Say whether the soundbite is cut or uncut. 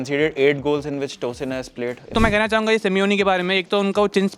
cut